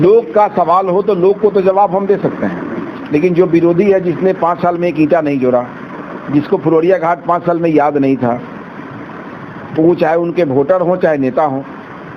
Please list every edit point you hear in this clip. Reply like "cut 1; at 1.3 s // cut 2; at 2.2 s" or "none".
none